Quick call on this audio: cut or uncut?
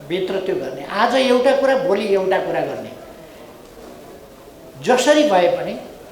uncut